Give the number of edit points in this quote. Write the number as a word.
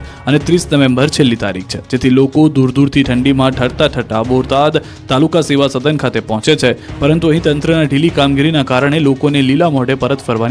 zero